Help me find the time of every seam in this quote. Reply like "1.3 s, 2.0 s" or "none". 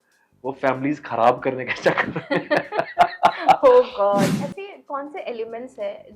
4.3 s

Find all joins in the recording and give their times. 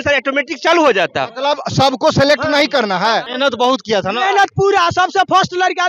3.3 s

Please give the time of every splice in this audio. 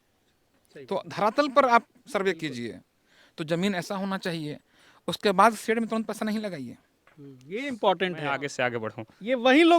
8.4 s

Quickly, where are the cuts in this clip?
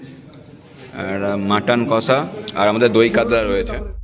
none

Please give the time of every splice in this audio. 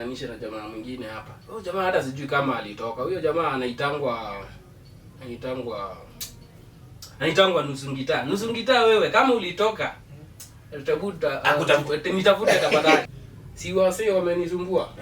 13.0 s

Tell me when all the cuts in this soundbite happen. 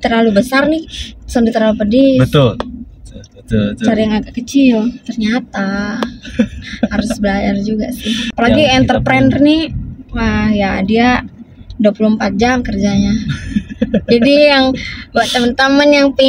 8.3 s

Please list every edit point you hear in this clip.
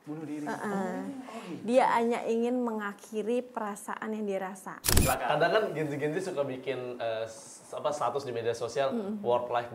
4.9 s

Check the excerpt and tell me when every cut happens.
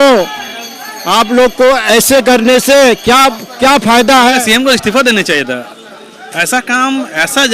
4.4 s

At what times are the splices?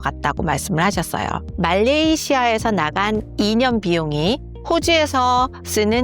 1.5 s

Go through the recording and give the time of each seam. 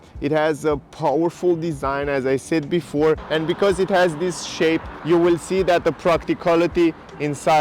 3.2 s, 4.9 s

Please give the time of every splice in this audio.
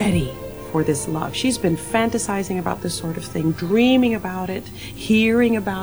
none

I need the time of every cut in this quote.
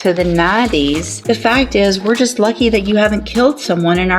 1.1 s

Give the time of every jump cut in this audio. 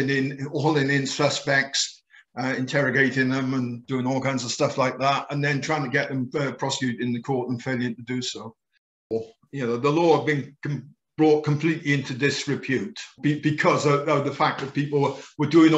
9.0 s, 13.1 s

